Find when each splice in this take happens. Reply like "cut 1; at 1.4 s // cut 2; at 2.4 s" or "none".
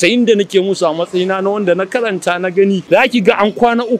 cut 1; at 2.8 s